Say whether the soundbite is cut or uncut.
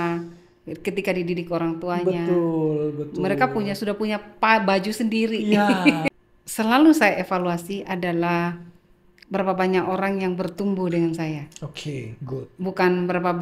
cut